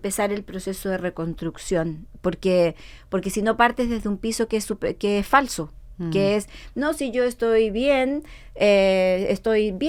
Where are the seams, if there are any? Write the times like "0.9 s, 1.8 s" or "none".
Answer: none